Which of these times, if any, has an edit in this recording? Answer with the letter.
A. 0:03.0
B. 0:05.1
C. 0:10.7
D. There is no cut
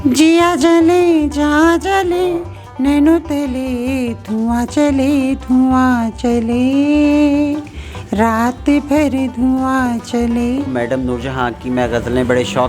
C